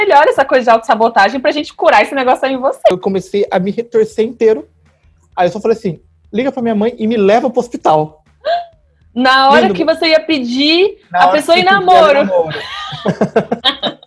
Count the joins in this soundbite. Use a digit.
1